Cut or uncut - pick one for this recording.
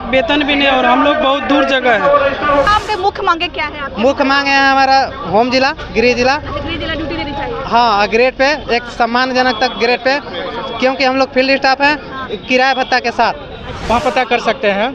cut